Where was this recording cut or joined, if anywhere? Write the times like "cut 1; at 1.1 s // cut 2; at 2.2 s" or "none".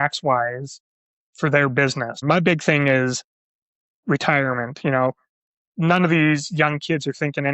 cut 1; at 2.2 s